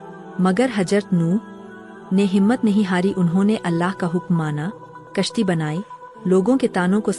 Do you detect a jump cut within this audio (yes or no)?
no